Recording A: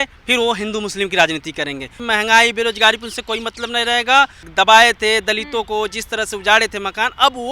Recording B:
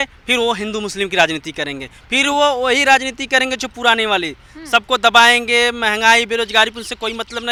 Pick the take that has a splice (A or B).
A